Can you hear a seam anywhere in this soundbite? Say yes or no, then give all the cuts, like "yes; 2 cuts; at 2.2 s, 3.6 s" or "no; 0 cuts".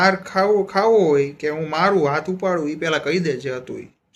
no; 0 cuts